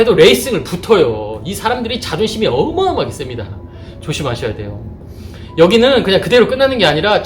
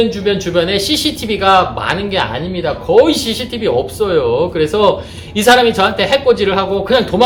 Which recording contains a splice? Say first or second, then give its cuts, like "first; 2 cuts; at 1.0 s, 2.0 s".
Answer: first; 1 cut; at 3.8 s